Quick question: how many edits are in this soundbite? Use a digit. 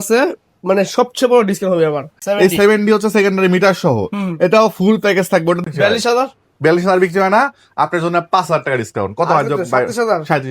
2